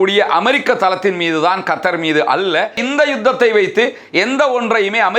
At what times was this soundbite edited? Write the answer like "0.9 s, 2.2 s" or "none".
2.8 s